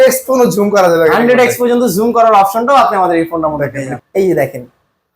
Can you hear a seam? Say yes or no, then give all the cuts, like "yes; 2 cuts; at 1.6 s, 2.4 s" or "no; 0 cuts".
yes; 1 cut; at 4.0 s